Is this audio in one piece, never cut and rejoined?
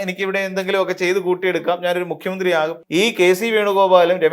no; 1 cut; at 2.8 s

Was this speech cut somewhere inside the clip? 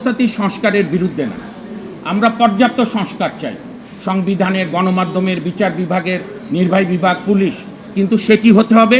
no; 0 cuts

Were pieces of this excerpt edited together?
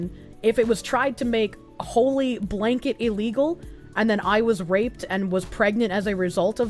no; 0 cuts

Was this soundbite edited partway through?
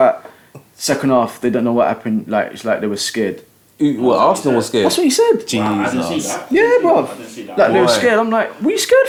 no; 0 cuts

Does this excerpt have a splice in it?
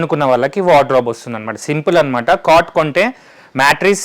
no; 0 cuts

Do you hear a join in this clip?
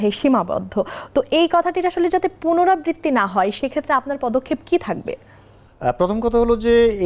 no; 0 cuts

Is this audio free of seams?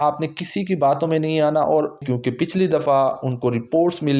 no; 1 cut; at 2.0 s

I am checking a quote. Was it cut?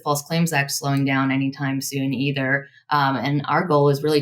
no; 0 cuts

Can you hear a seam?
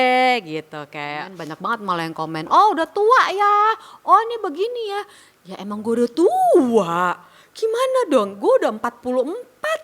yes; 1 cut; at 1.4 s

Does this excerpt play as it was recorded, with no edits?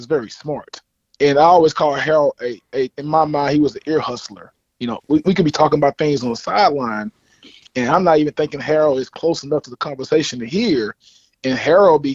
no; 1 cut; at 1.0 s

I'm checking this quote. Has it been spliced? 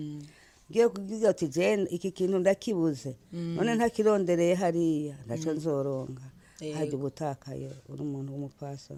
no; 0 cuts

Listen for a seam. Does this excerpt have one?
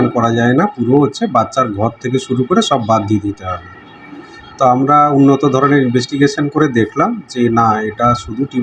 no; 0 cuts

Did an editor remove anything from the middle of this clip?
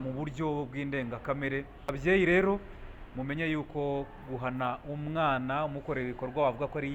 yes; 1 cut; at 1.9 s

